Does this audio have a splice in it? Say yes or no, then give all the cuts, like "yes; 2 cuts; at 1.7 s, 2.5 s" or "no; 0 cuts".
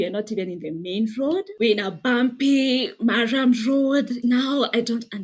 yes; 2 cuts; at 1.5 s, 4.2 s